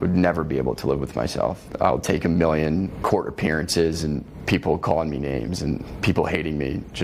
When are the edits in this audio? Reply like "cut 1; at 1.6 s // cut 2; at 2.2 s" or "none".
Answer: cut 1; at 1.6 s // cut 2; at 2.9 s // cut 3; at 4.3 s // cut 4; at 5.9 s